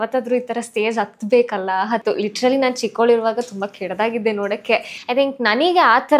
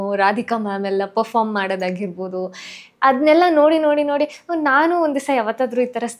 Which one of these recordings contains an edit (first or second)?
first